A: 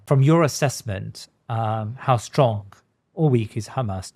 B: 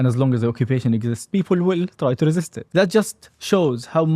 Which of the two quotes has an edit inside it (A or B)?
B